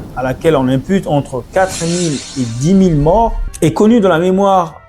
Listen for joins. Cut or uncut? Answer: cut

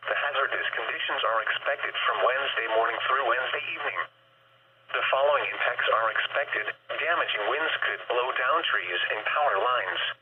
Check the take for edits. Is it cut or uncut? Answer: uncut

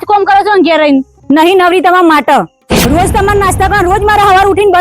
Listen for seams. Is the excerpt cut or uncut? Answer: cut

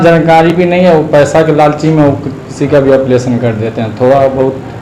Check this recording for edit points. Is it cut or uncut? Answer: uncut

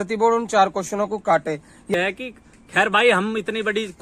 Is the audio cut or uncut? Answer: cut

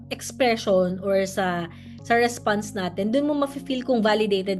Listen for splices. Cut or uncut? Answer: uncut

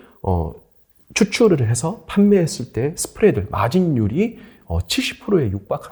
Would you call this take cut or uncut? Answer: uncut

